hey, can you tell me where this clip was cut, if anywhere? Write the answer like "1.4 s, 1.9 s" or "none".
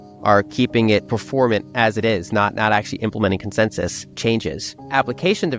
1.1 s, 4.3 s